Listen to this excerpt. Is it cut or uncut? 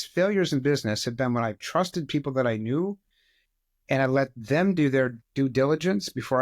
uncut